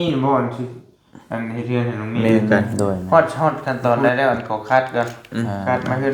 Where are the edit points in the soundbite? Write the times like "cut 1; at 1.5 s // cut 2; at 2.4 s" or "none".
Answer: cut 1; at 3.0 s